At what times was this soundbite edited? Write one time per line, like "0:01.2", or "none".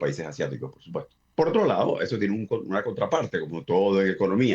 0:01.2